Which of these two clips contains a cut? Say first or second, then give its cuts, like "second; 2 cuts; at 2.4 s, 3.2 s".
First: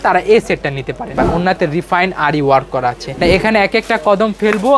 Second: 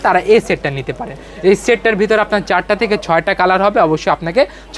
first; 2 cuts; at 1.1 s, 3.1 s